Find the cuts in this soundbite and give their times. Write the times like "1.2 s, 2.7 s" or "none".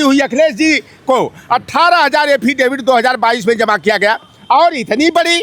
none

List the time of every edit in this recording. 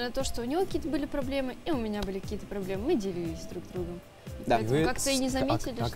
none

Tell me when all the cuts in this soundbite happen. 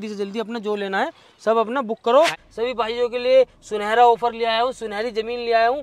2.4 s

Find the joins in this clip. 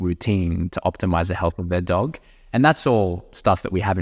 none

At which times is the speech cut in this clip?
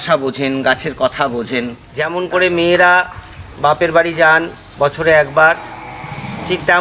1.8 s

